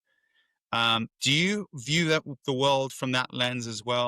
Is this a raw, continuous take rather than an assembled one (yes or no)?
no